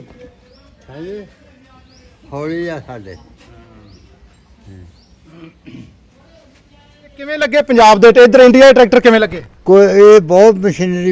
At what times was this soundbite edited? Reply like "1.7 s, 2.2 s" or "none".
7.4 s